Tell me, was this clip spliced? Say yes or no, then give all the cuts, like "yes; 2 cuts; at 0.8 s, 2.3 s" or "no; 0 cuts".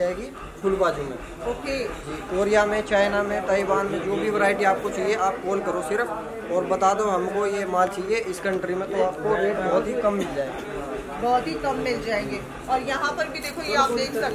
no; 0 cuts